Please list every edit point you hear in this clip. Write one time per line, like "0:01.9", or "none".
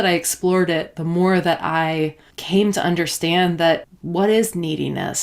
0:02.3
0:03.9

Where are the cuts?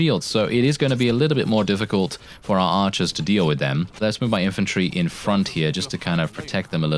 0:04.0

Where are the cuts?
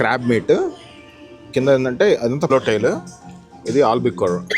0:02.5

